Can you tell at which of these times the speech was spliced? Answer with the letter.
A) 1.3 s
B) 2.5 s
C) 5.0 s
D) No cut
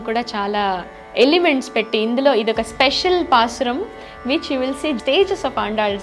C